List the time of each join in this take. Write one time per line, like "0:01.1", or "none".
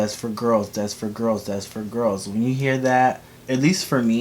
0:03.3